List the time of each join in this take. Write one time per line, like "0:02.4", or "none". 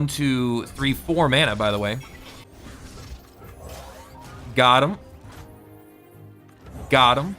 0:02.4
0:05.2

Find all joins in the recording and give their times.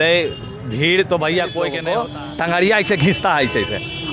0:01.8

